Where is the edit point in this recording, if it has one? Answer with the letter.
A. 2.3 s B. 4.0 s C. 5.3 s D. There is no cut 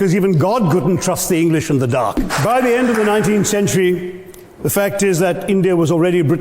A